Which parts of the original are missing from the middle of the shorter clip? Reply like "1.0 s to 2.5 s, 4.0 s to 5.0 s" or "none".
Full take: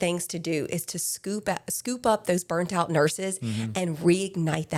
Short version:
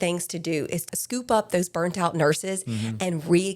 1.0 s to 1.7 s